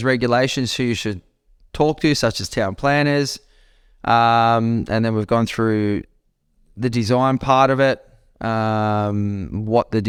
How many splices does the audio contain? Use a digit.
0